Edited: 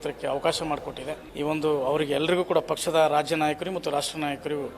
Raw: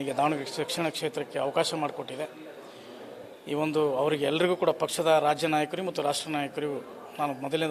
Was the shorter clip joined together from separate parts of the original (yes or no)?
yes